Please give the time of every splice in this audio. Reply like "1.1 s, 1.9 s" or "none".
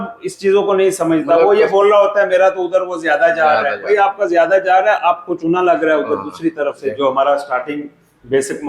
6.8 s

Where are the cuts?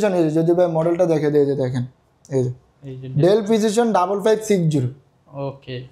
none

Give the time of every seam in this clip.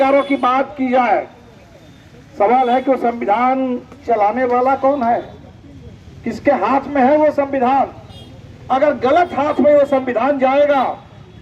none

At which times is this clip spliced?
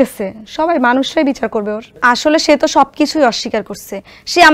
none

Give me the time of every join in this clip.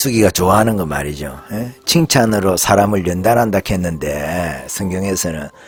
none

